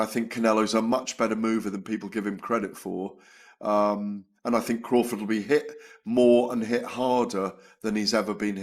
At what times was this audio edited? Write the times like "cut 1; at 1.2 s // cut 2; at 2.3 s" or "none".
none